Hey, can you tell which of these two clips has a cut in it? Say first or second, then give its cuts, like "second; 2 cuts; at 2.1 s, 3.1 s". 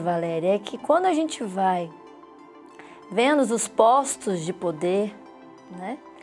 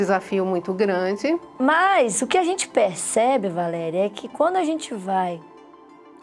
second; 1 cut; at 1.5 s